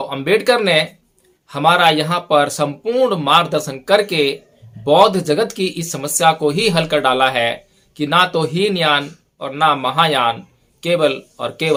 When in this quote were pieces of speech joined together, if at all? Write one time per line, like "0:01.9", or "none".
none